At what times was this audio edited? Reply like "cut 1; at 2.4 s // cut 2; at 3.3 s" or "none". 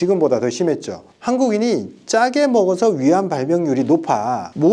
none